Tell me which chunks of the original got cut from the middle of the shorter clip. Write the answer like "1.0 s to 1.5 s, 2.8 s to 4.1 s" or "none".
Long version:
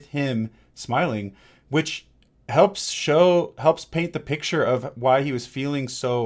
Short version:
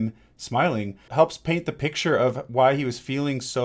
1.4 s to 3.5 s